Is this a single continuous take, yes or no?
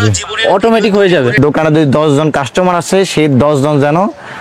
no